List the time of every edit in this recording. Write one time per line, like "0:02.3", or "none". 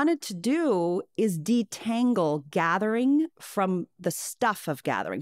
none

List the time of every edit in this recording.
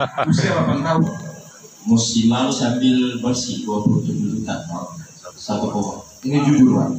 0:01.1

